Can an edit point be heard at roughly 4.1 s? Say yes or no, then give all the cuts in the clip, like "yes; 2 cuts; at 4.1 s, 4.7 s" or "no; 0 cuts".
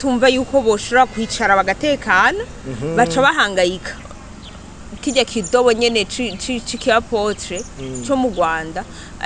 yes; 1 cut; at 4.1 s